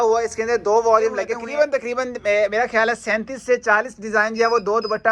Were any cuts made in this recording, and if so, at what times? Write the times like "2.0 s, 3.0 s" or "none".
1.4 s